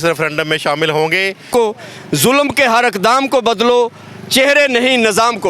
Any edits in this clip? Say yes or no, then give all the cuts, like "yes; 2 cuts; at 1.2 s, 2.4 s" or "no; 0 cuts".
yes; 1 cut; at 1.5 s